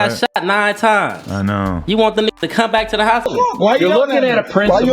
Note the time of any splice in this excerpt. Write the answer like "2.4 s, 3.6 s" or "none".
3.3 s